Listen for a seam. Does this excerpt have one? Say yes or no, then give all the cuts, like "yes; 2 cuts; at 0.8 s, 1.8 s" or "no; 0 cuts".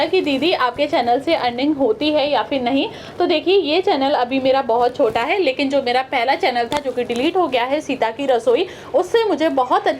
no; 0 cuts